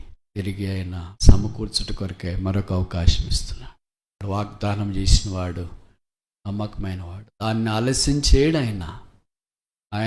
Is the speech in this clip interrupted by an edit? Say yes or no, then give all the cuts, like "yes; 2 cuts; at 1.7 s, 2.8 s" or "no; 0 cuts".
yes; 1 cut; at 4.1 s